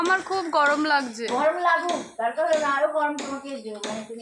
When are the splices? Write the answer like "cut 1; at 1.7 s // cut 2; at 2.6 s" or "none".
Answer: none